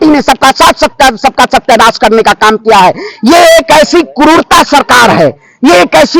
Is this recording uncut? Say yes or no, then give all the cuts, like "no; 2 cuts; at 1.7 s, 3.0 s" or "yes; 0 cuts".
yes; 0 cuts